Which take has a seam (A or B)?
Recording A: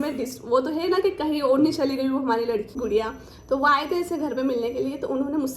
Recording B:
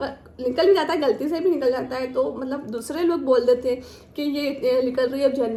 A